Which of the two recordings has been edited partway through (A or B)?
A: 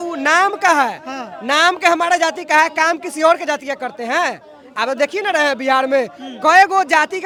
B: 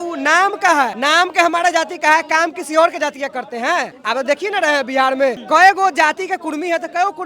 B